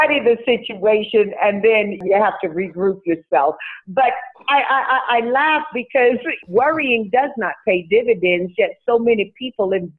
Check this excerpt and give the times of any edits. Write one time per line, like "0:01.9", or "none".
0:02.0
0:06.4